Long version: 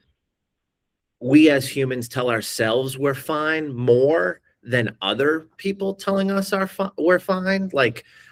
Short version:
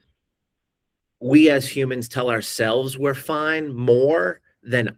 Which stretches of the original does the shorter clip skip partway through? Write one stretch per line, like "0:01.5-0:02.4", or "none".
none